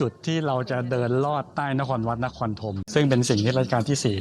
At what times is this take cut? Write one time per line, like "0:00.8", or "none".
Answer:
0:02.8